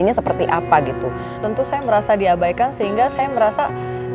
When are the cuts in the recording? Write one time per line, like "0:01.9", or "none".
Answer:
0:01.4